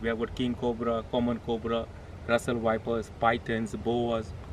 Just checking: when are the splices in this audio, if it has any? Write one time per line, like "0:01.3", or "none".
none